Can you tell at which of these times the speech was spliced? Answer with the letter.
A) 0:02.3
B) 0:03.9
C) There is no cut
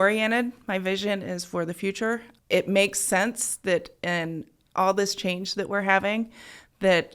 A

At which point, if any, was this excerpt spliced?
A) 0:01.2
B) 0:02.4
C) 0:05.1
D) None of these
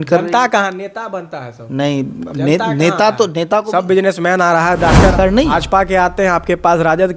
C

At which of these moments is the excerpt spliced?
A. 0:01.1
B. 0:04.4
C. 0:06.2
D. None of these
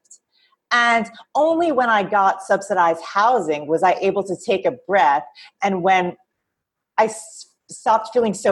D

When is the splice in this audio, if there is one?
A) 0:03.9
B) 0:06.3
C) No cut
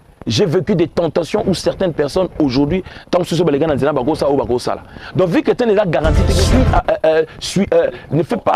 B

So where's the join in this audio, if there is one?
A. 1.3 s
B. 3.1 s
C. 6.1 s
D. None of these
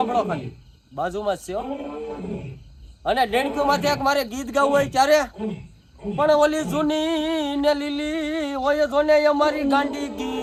D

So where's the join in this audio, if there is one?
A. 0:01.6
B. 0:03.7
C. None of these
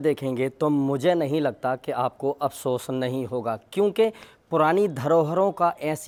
C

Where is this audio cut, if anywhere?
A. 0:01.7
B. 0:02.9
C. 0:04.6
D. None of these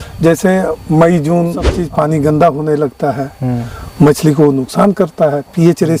A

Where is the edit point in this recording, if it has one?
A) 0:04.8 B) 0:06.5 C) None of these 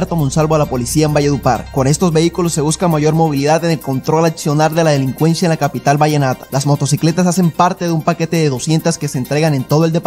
C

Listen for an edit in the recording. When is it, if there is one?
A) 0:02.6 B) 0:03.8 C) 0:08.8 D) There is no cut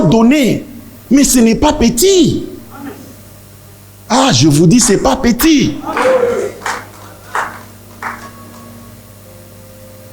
D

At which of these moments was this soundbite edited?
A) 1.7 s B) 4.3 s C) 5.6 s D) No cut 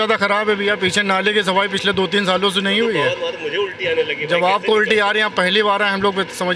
D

